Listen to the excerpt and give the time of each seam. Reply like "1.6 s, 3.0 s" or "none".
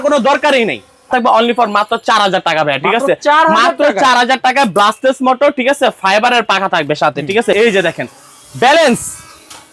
1.1 s, 7.5 s